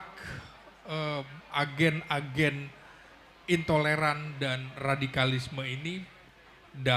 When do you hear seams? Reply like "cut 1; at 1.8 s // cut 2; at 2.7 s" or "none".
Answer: cut 1; at 1.4 s